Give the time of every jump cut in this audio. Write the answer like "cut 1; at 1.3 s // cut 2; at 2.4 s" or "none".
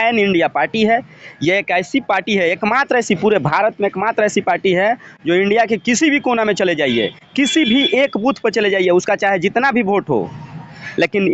none

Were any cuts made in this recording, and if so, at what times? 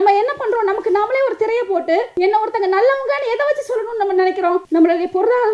cut 1; at 2.1 s // cut 2; at 4.6 s

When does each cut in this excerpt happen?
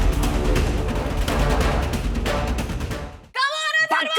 cut 1; at 1.1 s // cut 2; at 2.9 s

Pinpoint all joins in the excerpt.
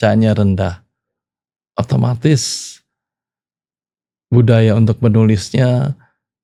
none

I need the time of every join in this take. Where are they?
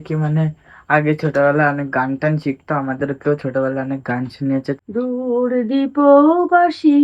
cut 1; at 4.8 s

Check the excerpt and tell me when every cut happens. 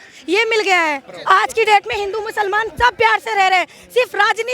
cut 1; at 1.1 s

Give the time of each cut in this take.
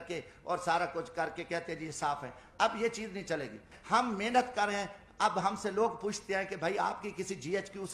cut 1; at 3.7 s

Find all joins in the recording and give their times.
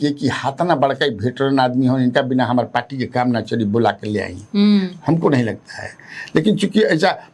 none

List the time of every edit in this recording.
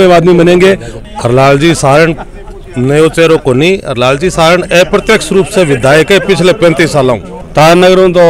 cut 1; at 0.9 s // cut 2; at 7.3 s

